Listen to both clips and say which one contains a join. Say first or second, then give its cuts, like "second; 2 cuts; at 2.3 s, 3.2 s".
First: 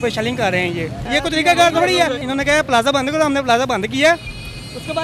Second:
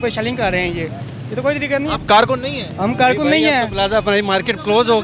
first; 2 cuts; at 1.0 s, 2.2 s